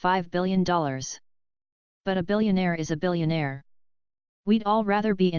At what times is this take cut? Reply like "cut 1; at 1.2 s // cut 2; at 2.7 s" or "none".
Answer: cut 1; at 2.5 s